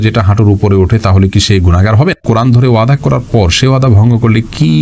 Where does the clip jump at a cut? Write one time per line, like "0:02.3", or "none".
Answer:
0:02.2